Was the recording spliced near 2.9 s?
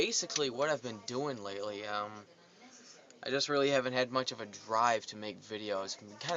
no; 1 cut; at 5.2 s

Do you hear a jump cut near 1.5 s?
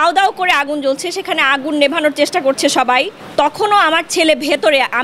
no; 1 cut; at 3.2 s

